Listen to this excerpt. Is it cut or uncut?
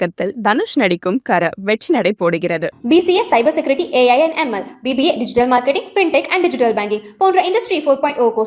uncut